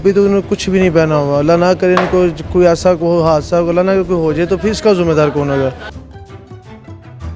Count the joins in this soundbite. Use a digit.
1